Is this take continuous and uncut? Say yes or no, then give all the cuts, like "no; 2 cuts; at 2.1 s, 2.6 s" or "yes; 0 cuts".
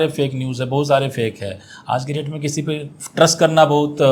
yes; 0 cuts